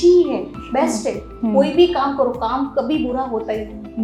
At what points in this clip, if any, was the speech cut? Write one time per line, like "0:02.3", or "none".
none